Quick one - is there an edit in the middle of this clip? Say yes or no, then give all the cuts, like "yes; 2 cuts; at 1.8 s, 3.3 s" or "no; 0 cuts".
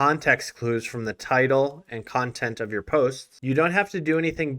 no; 0 cuts